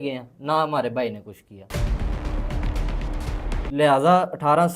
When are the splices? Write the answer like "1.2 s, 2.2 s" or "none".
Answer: none